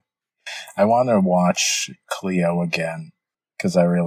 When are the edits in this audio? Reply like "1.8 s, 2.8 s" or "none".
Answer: none